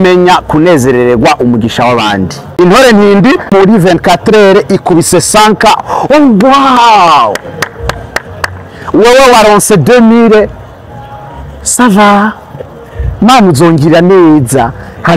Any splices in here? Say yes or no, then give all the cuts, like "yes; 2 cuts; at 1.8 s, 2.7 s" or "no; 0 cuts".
yes; 2 cuts; at 2.4 s, 3.5 s